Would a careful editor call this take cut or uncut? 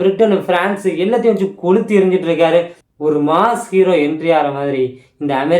cut